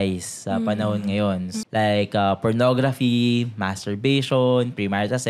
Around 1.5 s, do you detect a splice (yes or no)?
yes